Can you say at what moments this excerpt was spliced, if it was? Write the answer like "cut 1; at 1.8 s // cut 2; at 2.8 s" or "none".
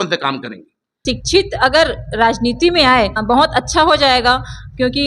cut 1; at 0.9 s // cut 2; at 3.2 s